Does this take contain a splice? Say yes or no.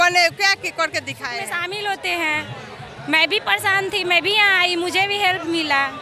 yes